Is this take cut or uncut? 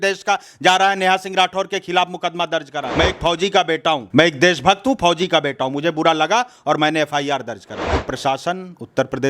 cut